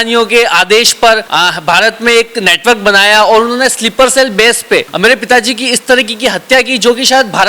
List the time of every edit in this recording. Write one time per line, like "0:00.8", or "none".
0:01.3
0:04.9